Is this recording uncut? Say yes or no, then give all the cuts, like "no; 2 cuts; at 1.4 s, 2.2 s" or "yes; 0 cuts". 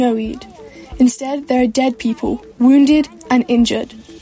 yes; 0 cuts